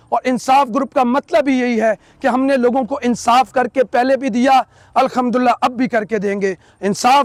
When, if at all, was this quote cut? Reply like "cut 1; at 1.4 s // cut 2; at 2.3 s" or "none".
none